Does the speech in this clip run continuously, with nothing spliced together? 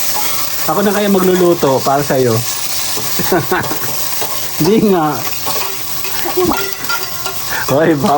yes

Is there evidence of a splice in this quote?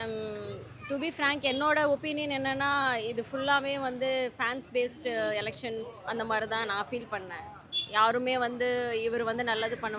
no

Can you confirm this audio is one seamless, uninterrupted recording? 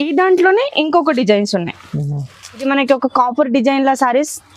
no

